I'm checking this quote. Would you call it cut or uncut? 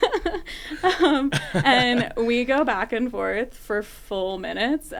uncut